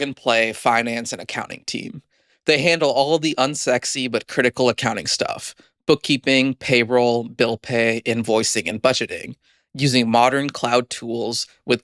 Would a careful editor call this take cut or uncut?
uncut